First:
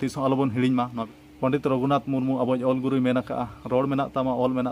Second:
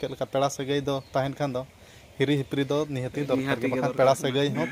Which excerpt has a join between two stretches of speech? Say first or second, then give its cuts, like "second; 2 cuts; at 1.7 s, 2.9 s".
first; 1 cut; at 1.0 s